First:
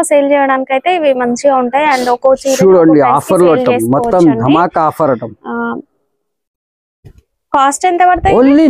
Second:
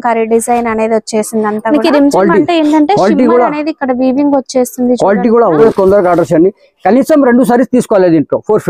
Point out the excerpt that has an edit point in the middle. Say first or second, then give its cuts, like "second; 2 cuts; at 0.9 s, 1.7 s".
second; 2 cuts; at 1.6 s, 5.6 s